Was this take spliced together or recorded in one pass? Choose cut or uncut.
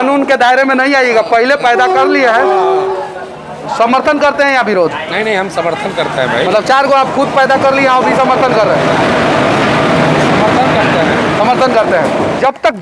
uncut